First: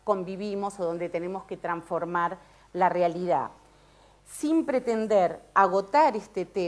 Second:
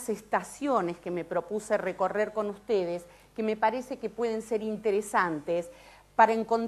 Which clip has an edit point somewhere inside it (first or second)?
first